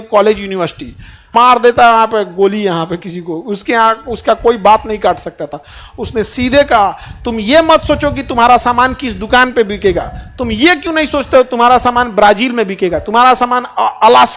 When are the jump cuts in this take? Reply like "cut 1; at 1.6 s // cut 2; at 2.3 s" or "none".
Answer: cut 1; at 1.2 s